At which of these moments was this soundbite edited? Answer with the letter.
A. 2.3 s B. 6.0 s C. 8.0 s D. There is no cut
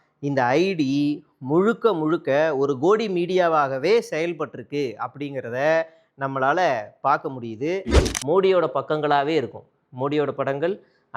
C